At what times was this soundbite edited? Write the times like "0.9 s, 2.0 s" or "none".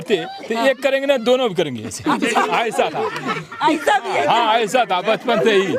none

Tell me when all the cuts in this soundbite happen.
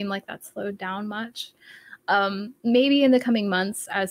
none

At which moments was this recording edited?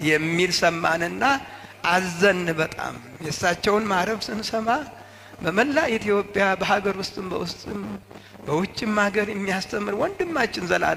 none

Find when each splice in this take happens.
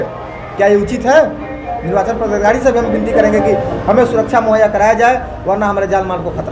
none

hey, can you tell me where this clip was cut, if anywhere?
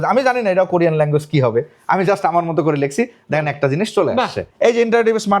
4.5 s

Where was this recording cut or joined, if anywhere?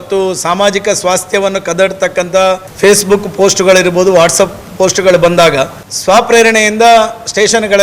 2.7 s, 5.8 s

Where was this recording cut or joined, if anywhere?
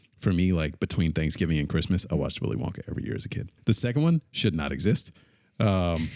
3.5 s

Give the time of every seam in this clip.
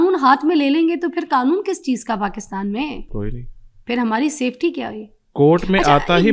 none

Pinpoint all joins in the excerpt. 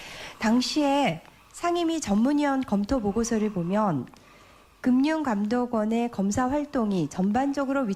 none

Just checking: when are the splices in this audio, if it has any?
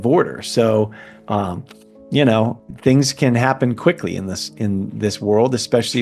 none

